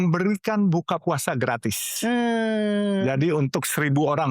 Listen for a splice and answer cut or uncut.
uncut